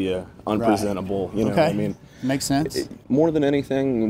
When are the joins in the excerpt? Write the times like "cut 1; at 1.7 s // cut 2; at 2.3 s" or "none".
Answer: cut 1; at 3.0 s